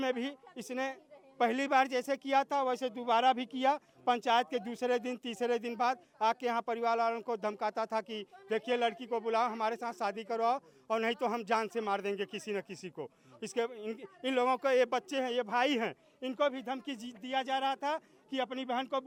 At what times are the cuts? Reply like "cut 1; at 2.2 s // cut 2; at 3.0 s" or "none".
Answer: none